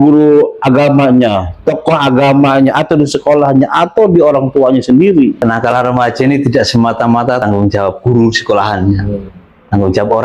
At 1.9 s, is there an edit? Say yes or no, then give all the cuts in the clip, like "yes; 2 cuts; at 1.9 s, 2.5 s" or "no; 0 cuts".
no; 2 cuts; at 5.4 s, 7.4 s